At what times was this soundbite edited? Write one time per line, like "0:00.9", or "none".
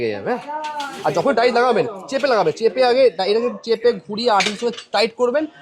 none